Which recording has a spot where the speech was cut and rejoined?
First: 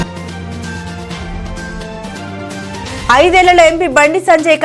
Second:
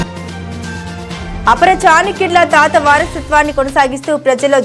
first; 1 cut; at 1.2 s

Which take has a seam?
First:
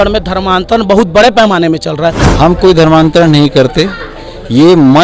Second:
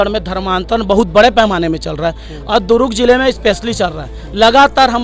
first; 1 cut; at 2.2 s

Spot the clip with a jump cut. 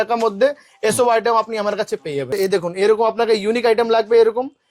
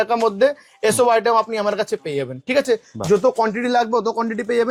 first; 1 cut; at 2.3 s

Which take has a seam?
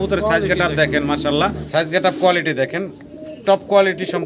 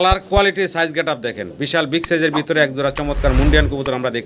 first; 1 cut; at 1.6 s

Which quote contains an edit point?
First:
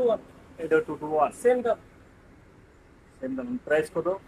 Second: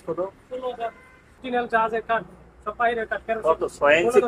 second; 1 cut; at 1.4 s

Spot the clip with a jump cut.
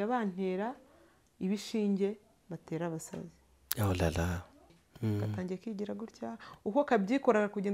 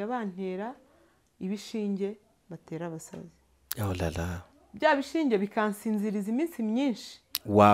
first; 1 cut; at 4.7 s

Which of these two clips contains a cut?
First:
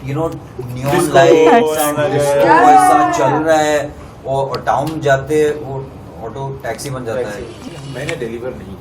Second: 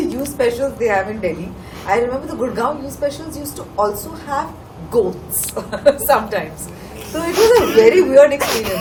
first; 1 cut; at 7.6 s

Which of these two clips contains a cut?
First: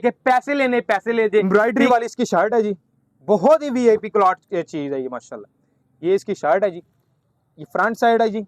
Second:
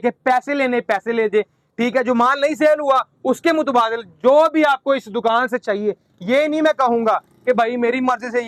first; 1 cut; at 1.4 s

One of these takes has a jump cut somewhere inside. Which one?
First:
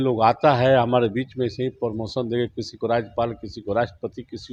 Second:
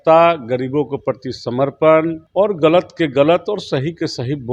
second; 1 cut; at 2.2 s

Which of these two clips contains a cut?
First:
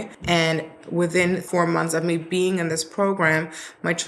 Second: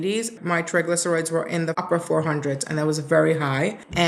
first; 1 cut; at 1.4 s

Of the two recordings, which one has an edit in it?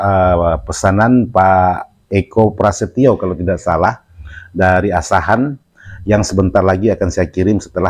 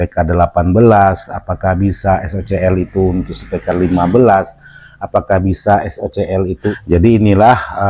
second; 1 cut; at 6.8 s

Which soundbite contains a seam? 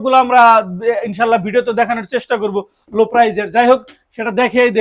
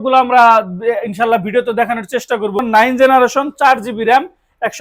second; 1 cut; at 2.7 s

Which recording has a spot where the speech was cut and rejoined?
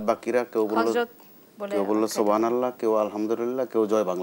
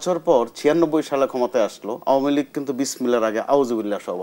second; 1 cut; at 1.9 s

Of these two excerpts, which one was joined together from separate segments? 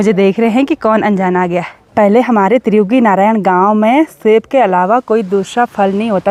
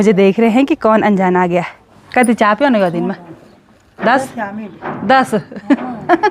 second; 1 cut; at 1.8 s

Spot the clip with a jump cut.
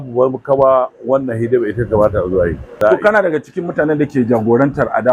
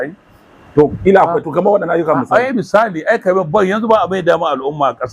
first; 1 cut; at 2.7 s

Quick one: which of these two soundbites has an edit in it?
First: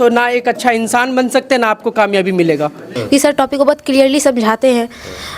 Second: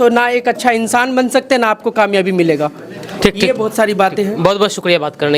first; 1 cut; at 2.9 s

